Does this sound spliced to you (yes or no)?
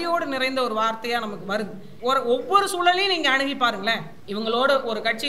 yes